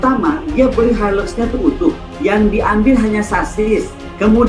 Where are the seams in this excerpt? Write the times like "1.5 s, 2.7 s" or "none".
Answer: 2.1 s